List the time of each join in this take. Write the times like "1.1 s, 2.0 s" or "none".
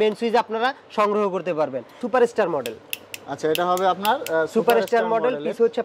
2.0 s